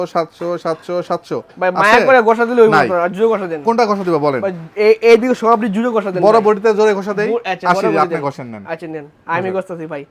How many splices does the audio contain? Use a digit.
0